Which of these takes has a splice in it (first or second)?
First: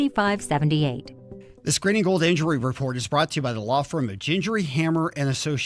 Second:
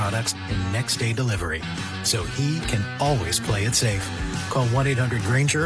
first